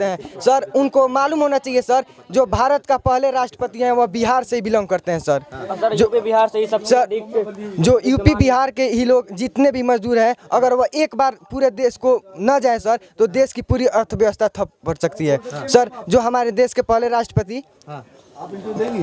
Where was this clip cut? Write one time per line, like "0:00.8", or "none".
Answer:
none